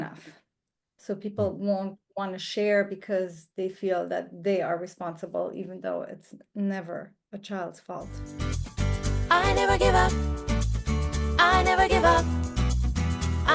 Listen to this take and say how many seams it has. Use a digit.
1